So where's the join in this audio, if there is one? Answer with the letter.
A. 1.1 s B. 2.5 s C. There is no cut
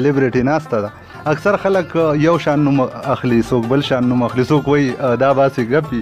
A